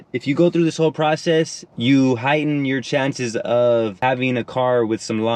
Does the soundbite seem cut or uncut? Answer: cut